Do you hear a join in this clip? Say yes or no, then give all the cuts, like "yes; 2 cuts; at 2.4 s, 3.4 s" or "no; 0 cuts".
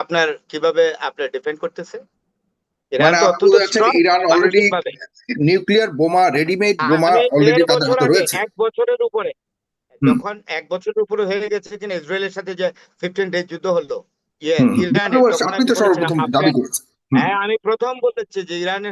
no; 0 cuts